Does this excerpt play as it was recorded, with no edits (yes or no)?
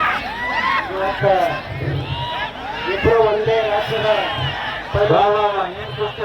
yes